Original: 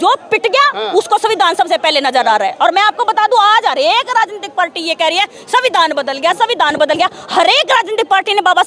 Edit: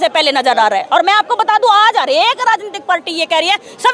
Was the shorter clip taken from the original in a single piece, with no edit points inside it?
yes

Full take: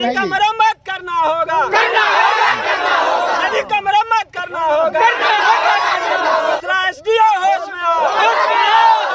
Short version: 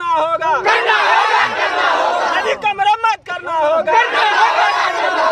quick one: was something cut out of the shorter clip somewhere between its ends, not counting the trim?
no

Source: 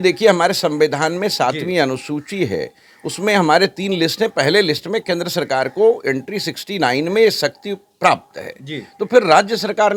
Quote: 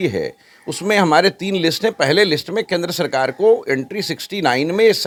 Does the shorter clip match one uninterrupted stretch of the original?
yes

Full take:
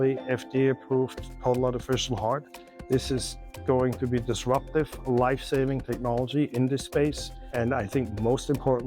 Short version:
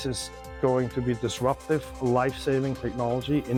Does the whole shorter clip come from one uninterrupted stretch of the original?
yes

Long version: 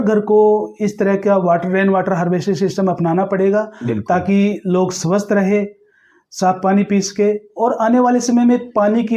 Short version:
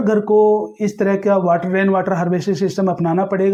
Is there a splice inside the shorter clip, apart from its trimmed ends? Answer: no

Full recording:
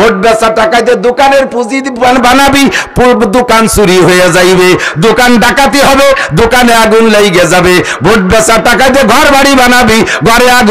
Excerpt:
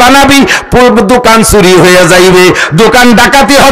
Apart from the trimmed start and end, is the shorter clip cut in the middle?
no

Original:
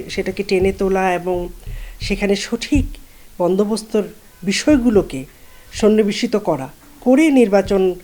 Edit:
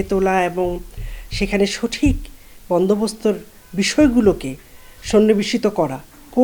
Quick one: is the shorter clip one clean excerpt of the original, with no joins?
yes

